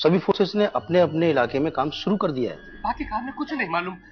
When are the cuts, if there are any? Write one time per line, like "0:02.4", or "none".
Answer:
0:02.7

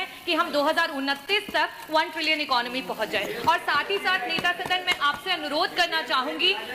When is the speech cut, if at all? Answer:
none

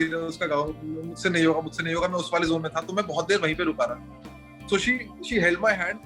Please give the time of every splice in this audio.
none

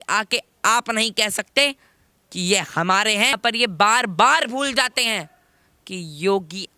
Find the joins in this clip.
0:03.4

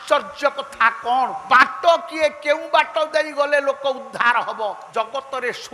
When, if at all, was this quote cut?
0:01.4
0:04.8

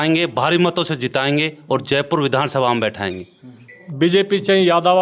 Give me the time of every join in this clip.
0:03.8

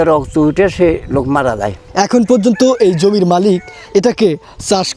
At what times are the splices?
0:01.8

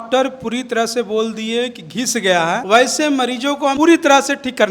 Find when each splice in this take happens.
0:02.6
0:03.7

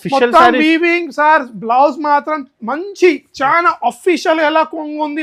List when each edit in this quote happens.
none

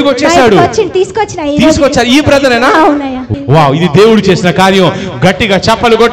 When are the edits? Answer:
0:03.2

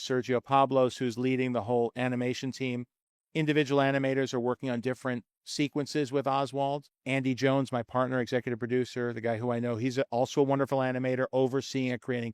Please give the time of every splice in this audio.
0:06.9

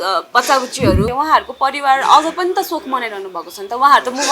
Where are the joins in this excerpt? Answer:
0:01.1

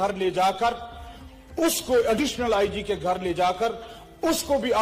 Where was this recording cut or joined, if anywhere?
none

